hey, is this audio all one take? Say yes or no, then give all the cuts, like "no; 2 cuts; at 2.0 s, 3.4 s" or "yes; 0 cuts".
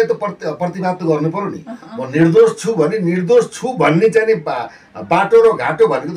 yes; 0 cuts